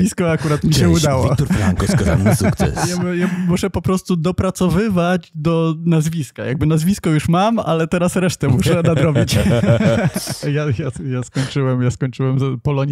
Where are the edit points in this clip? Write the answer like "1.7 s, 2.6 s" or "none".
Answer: 3.1 s, 10.3 s